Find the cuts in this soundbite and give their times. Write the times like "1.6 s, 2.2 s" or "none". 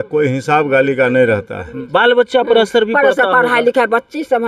1.8 s